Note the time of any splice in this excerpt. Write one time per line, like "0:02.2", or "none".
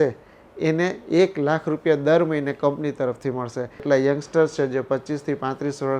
0:03.8